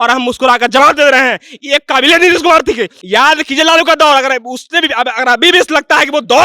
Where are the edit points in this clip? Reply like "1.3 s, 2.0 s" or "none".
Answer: 2.9 s

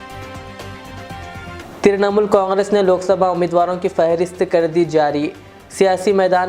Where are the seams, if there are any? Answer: 1.6 s

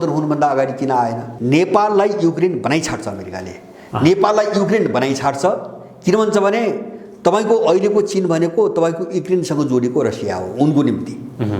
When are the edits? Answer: 1.3 s

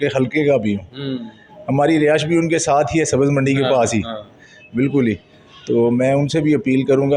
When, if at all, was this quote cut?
none

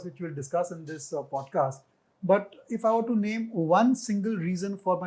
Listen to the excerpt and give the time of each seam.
none

